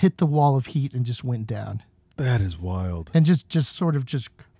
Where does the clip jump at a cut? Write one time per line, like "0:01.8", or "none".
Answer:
none